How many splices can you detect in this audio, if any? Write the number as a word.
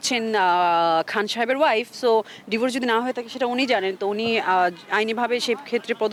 zero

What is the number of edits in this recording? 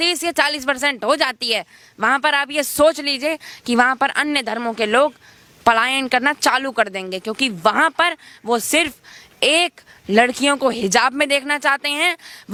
zero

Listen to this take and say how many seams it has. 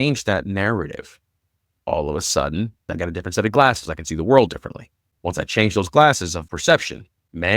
two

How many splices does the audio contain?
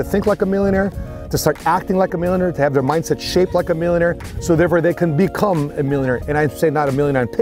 zero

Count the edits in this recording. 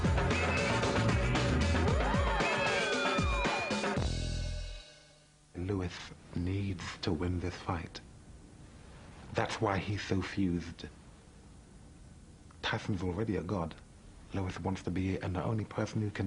one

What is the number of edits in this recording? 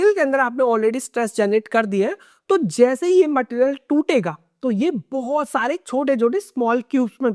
zero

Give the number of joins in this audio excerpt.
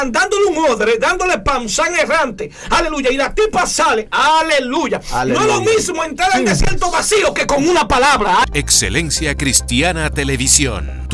one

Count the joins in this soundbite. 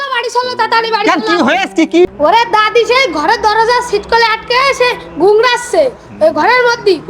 one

